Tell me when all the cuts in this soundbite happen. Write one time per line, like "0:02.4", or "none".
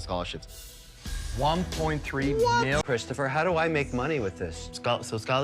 0:02.8